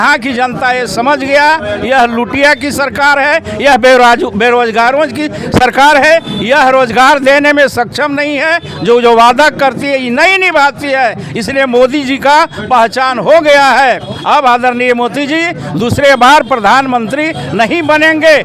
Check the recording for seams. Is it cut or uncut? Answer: uncut